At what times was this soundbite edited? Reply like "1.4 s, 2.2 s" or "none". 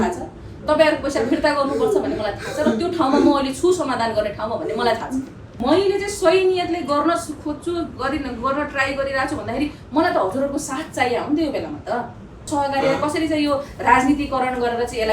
5.5 s, 12.5 s